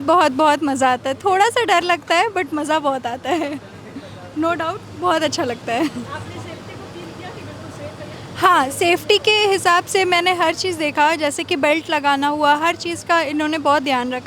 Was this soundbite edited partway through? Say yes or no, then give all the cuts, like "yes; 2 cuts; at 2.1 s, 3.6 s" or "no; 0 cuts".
no; 0 cuts